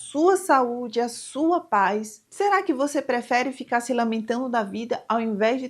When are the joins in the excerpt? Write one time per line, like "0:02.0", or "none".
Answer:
0:02.2